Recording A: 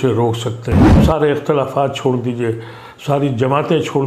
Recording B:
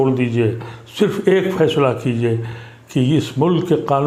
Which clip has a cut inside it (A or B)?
A